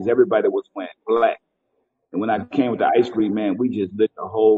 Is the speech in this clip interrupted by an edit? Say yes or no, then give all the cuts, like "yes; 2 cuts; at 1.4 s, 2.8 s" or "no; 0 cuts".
no; 0 cuts